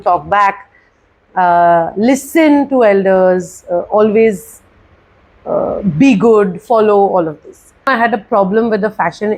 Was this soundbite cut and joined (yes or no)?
yes